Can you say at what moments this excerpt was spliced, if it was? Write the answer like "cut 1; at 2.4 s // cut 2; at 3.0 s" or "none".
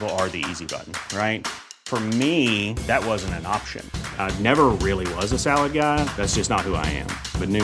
none

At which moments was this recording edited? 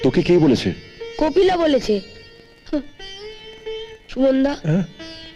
none

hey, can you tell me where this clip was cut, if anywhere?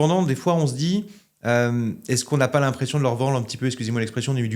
none

